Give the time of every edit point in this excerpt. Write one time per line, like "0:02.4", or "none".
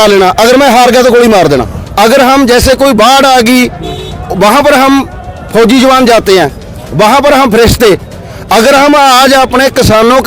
0:01.8